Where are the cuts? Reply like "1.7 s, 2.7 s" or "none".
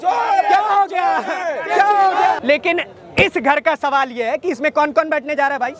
2.4 s